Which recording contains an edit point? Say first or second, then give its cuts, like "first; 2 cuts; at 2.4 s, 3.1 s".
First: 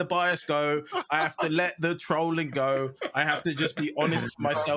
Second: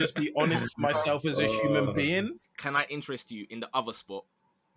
second; 1 cut; at 2.5 s